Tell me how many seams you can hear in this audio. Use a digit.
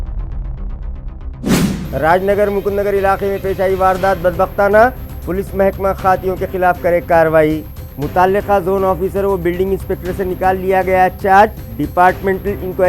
1